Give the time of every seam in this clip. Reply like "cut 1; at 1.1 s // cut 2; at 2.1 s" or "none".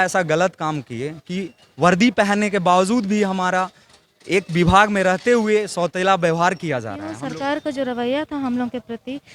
cut 1; at 7.1 s